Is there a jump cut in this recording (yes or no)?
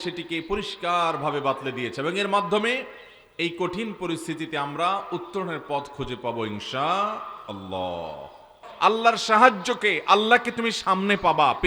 yes